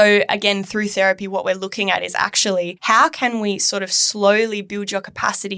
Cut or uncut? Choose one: cut